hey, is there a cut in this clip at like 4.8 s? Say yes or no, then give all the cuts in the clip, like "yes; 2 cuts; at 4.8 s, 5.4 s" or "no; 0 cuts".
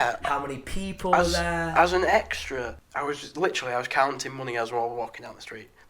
no; 1 cut; at 2.8 s